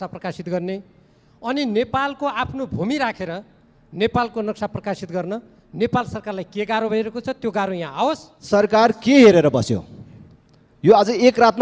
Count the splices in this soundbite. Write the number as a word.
one